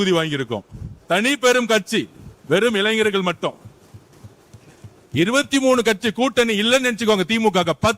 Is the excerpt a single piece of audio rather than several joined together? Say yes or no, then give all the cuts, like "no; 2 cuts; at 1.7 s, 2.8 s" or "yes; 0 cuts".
yes; 0 cuts